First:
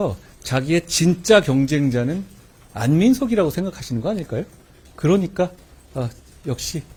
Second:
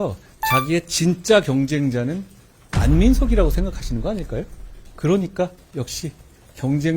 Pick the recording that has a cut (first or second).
second